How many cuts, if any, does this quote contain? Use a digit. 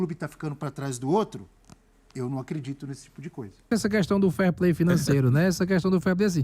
1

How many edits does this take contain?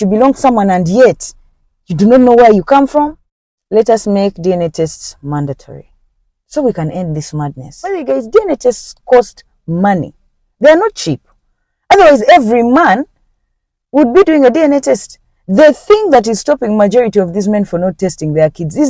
2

